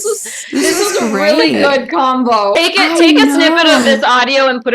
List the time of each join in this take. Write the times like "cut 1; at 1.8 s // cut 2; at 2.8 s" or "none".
cut 1; at 2.5 s